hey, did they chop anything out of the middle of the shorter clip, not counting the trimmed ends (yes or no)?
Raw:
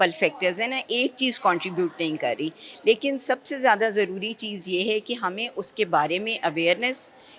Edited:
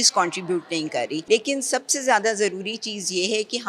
yes